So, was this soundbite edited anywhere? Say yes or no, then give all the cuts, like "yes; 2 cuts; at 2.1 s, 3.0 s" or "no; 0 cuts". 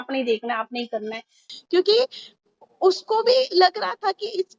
yes; 1 cut; at 1.5 s